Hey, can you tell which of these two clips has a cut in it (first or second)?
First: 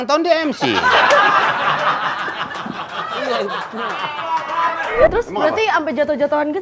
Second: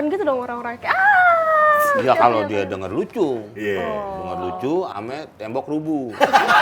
first